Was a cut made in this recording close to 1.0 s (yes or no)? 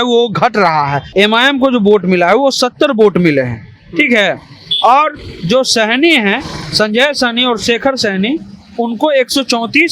yes